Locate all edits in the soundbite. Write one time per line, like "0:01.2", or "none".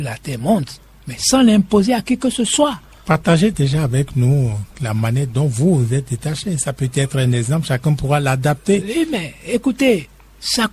none